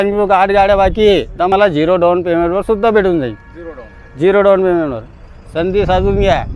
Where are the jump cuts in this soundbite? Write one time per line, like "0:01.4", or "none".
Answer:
0:01.5